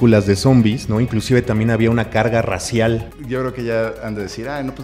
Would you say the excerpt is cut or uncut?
cut